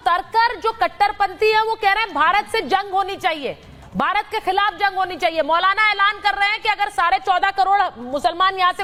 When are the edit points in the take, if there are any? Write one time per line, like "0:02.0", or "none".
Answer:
none